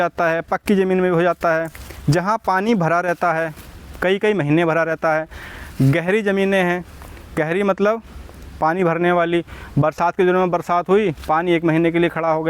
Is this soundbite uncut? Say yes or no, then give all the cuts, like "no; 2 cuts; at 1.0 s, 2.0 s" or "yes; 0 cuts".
yes; 0 cuts